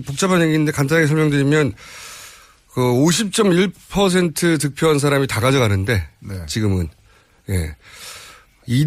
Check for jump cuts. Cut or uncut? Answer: uncut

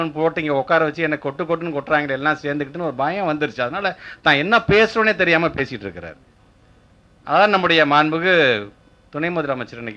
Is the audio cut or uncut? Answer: uncut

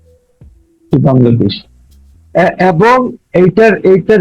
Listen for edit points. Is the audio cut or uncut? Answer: uncut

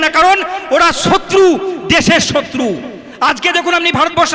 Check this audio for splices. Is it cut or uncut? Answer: uncut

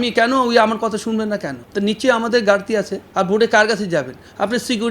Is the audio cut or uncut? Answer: cut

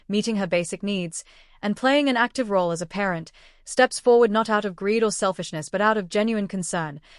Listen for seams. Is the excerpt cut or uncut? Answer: cut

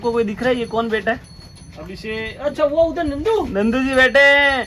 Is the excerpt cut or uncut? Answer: uncut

